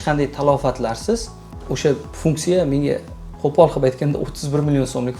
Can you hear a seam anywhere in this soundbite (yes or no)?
no